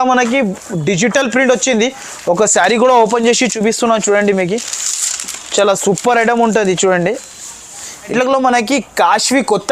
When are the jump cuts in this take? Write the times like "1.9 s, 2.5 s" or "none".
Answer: 8.1 s